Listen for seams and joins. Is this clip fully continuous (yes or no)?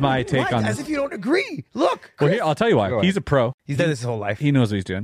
no